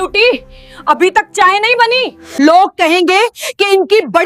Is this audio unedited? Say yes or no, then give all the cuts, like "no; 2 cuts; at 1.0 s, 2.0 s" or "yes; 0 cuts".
no; 1 cut; at 2.2 s